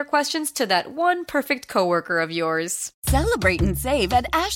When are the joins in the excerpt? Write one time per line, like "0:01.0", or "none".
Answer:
0:02.8